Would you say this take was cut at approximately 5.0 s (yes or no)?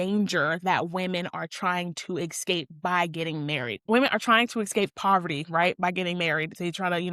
no